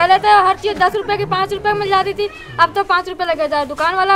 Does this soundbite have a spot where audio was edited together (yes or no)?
no